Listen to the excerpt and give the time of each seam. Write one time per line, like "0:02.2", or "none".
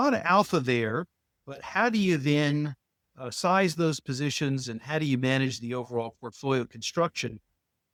none